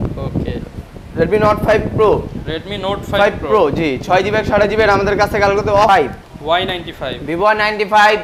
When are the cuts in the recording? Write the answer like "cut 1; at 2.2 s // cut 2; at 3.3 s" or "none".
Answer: cut 1; at 5.9 s